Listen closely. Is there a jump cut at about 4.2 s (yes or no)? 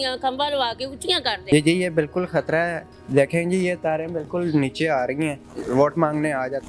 no